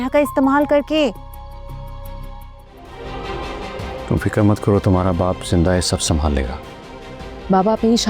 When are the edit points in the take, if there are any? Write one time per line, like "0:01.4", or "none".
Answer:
0:02.7

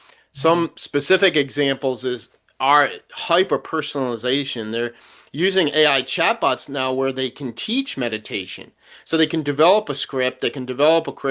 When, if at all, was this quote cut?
none

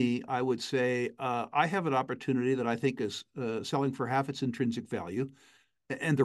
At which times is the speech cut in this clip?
none

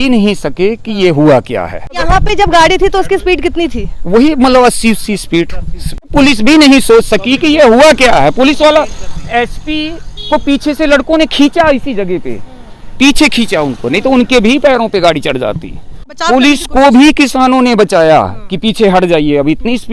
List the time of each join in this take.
0:02.0
0:06.1
0:16.2

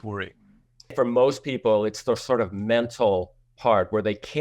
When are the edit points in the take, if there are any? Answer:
0:00.9

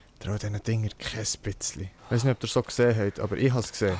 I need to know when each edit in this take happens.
0:01.9

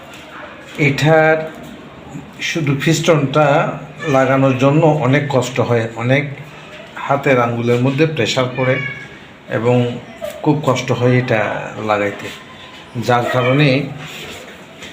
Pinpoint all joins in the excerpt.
none

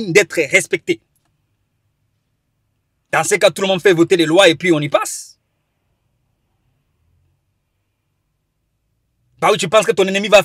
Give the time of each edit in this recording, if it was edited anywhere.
none

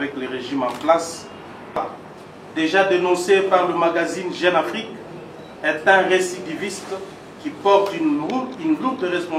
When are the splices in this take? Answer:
0:01.8

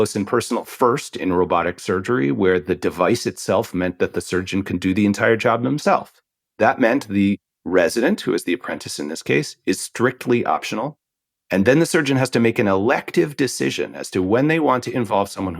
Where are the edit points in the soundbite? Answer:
0:06.6

